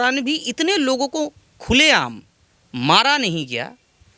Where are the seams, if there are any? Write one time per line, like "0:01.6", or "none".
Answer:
none